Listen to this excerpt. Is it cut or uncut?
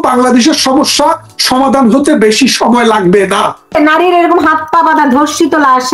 cut